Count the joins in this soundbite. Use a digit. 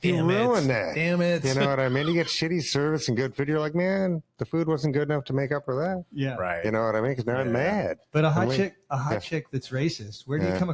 0